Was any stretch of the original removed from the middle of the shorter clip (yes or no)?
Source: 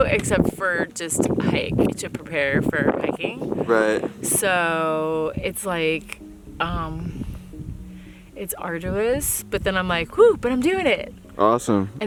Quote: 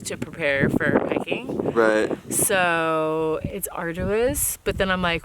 yes